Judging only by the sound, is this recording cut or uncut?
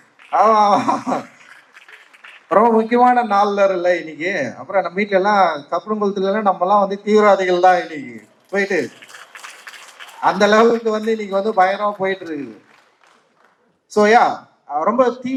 uncut